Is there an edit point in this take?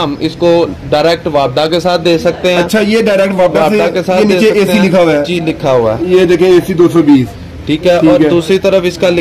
no; 0 cuts

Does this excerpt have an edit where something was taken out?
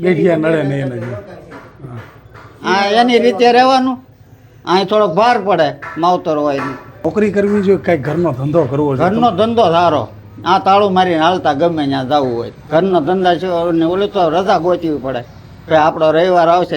yes; 2 cuts; at 7.0 s, 12.5 s

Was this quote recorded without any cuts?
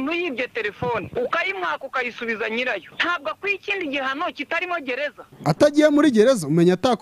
no; 3 cuts; at 1.1 s, 2.9 s, 5.3 s

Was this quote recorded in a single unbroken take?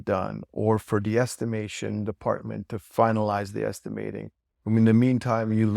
yes; 0 cuts

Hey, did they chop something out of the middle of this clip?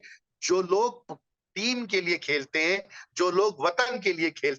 no; 0 cuts

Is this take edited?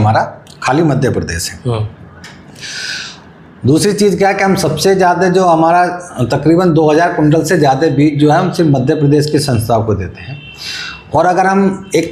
no; 0 cuts

